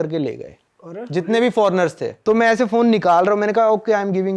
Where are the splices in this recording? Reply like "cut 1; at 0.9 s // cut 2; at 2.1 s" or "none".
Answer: cut 1; at 2.1 s